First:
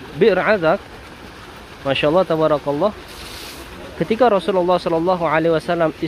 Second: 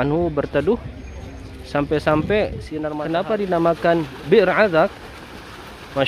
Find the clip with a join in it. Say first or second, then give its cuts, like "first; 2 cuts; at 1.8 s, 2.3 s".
second; 1 cut; at 3.2 s